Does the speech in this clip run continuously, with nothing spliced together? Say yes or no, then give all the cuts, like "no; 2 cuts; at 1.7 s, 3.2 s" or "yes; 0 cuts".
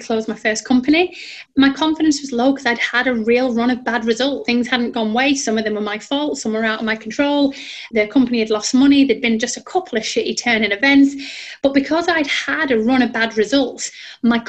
yes; 0 cuts